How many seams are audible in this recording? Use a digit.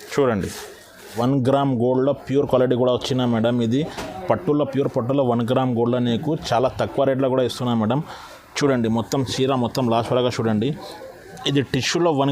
1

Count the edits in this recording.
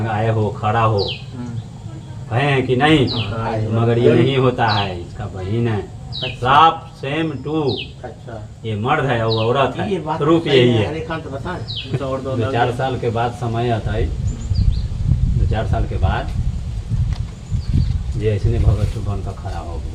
1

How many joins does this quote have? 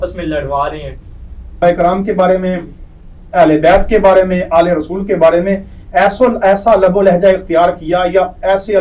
1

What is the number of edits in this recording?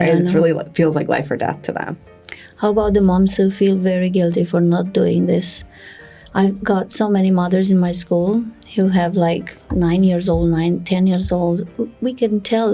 0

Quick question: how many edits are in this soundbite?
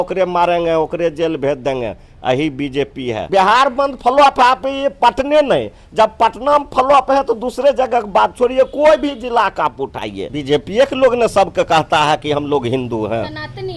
2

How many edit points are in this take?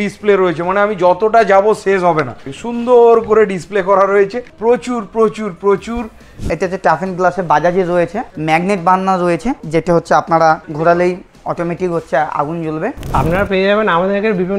8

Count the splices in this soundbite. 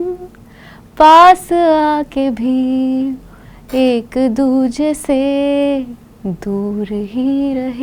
0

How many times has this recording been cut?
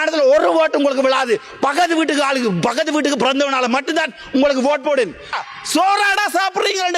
1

